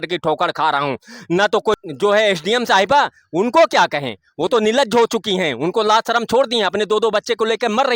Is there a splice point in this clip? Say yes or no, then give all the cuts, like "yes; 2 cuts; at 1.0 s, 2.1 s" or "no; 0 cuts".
yes; 1 cut; at 1.7 s